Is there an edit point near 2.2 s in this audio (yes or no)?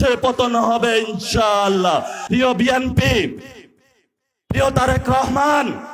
yes